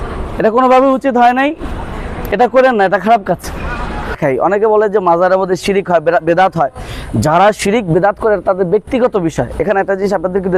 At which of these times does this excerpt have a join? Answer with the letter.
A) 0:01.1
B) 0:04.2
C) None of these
B